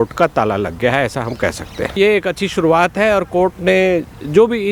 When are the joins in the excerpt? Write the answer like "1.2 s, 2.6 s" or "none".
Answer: 2.0 s